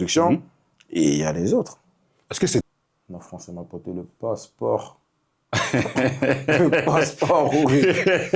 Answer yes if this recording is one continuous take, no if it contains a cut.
no